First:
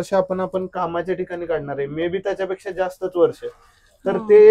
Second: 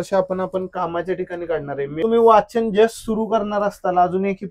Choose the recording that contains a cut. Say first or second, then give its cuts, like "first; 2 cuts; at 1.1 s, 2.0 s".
second; 1 cut; at 2.0 s